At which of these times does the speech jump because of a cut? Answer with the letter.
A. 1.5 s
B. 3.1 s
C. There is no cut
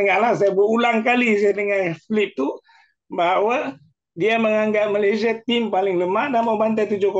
C